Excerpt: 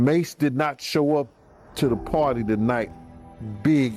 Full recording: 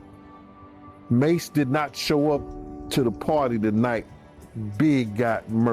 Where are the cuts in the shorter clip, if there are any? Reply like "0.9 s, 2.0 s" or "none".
none